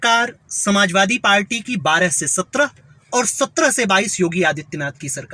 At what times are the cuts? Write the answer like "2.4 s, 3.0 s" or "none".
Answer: none